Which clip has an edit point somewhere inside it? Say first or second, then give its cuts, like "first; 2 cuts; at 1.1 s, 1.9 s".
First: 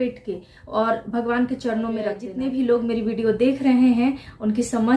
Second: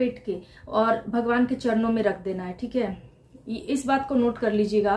first; 1 cut; at 2.3 s